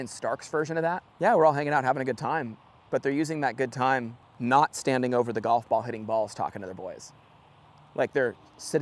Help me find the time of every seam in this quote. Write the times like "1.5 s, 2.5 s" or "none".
1.1 s, 4.2 s